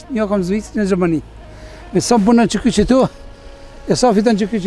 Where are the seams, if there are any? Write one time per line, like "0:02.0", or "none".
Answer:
none